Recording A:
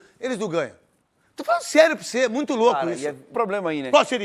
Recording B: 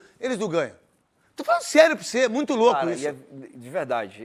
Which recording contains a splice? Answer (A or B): A